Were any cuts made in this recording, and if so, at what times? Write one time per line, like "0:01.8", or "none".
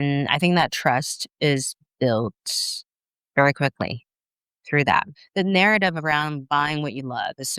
0:05.2